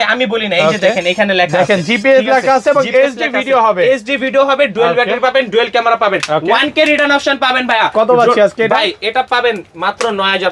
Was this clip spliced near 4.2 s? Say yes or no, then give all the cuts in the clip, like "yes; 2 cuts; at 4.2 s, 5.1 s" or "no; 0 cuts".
no; 0 cuts